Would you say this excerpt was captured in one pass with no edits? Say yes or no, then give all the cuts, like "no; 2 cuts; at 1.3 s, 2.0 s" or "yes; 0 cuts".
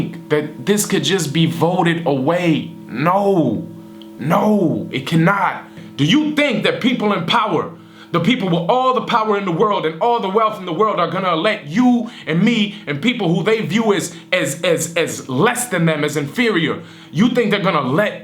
no; 1 cut; at 5.8 s